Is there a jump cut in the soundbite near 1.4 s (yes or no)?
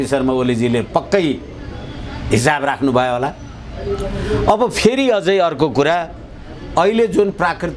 no